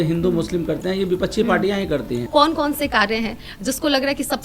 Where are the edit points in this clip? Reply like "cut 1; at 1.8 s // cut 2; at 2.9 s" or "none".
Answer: cut 1; at 2.3 s